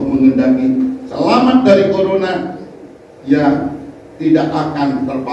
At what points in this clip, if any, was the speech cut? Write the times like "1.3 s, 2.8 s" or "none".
none